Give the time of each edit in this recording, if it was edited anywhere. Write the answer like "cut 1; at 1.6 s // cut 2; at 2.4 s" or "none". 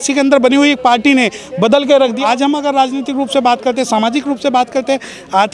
cut 1; at 2.2 s